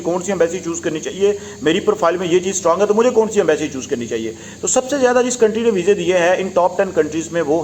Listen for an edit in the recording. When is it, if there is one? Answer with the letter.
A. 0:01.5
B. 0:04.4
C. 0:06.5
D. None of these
D